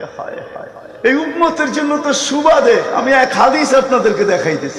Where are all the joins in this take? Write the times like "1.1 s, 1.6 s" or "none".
1.0 s